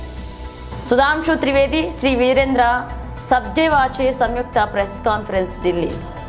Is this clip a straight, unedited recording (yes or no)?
yes